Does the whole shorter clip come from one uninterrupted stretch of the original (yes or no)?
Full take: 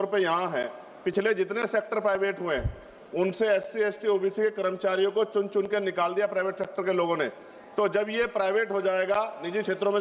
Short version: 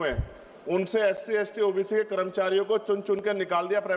yes